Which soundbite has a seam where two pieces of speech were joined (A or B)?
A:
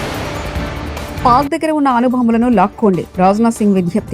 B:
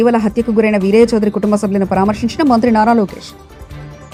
A